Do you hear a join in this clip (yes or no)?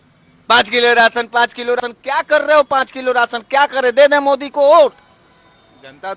yes